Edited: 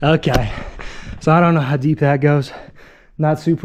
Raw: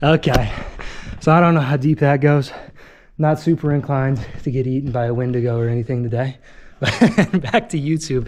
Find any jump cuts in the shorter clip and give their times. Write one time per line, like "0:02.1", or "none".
none